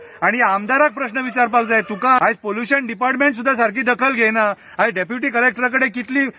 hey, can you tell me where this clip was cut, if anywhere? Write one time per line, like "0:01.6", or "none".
0:02.2